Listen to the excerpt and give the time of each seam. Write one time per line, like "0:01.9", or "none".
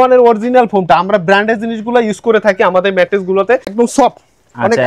0:03.7